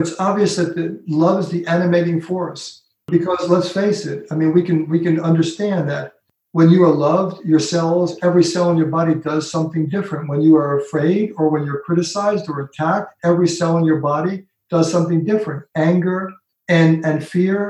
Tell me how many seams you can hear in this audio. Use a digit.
1